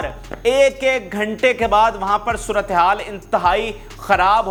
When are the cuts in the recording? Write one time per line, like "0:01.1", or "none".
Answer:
none